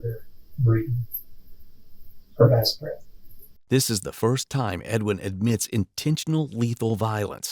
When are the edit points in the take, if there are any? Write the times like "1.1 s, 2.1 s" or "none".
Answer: none